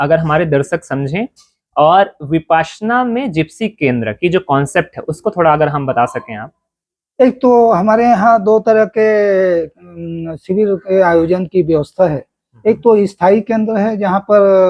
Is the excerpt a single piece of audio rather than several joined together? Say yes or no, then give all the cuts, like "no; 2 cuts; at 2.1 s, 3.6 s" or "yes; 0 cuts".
yes; 0 cuts